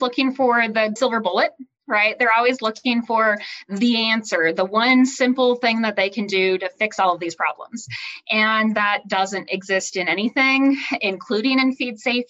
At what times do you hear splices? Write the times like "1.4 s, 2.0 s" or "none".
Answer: 1.0 s